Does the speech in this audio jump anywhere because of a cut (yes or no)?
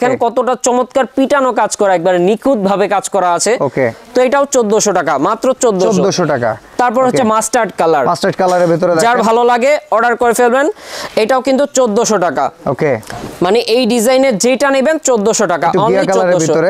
no